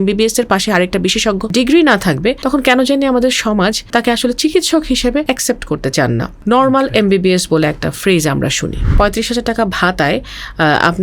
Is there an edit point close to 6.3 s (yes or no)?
yes